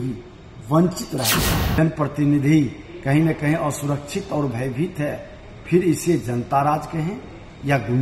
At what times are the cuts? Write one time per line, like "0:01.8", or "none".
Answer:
0:01.6